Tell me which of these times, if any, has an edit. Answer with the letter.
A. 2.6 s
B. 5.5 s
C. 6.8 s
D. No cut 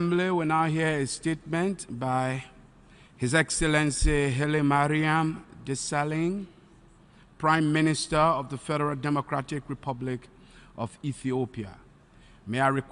D